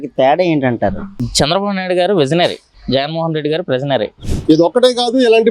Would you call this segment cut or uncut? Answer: cut